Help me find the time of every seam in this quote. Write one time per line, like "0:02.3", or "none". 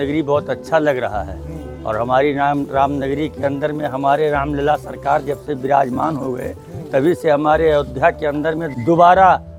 none